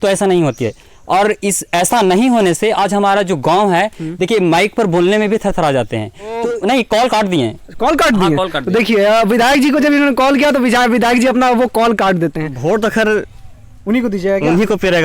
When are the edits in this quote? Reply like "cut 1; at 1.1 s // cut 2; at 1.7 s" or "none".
cut 1; at 6.5 s // cut 2; at 12.5 s